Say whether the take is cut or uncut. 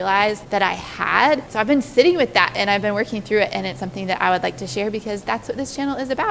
cut